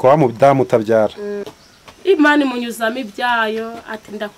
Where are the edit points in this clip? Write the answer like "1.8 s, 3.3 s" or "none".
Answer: 1.4 s